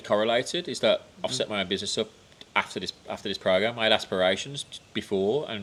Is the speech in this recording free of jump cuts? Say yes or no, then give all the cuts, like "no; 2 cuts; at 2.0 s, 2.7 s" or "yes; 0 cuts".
yes; 0 cuts